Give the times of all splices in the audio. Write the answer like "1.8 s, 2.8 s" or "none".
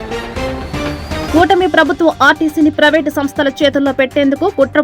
1.2 s